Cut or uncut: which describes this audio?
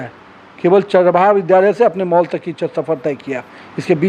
uncut